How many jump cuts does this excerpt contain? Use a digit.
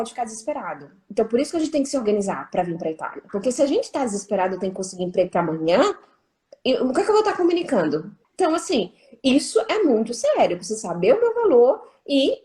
2